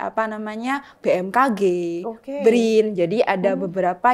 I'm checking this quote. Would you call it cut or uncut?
uncut